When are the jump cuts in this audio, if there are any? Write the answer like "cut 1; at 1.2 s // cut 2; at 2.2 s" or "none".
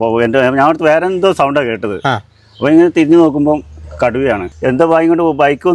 cut 1; at 4.5 s